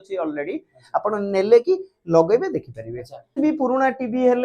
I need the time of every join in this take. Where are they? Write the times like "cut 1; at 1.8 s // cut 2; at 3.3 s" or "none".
cut 1; at 3.4 s